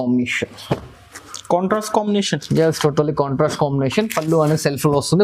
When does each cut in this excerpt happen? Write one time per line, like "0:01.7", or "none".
none